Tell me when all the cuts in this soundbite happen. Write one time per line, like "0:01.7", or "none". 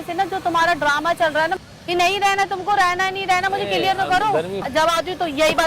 0:01.6
0:04.6